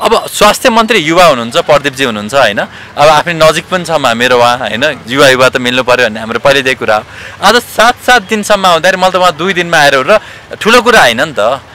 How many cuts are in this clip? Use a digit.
0